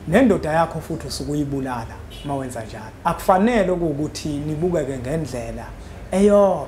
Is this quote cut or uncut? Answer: cut